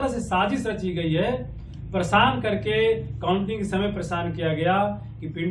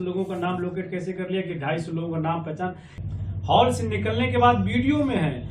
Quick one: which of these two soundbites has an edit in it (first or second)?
second